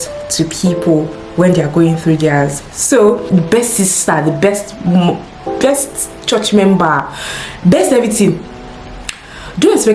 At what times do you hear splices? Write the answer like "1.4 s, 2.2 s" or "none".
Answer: 3.2 s